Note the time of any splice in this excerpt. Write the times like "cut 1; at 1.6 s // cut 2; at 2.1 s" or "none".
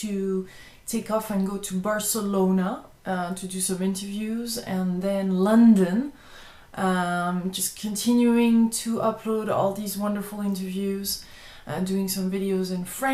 cut 1; at 3.6 s